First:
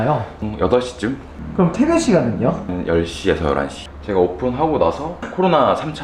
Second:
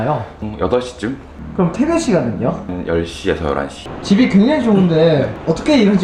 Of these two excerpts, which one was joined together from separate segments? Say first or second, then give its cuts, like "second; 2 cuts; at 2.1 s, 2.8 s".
first; 1 cut; at 3.9 s